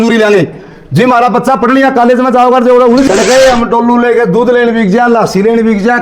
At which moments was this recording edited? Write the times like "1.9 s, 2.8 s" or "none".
3.1 s